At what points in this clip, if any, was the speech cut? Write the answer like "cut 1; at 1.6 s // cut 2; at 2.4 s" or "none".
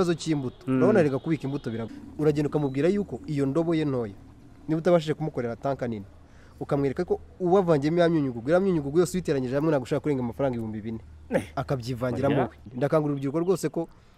cut 1; at 1.8 s // cut 2; at 12.6 s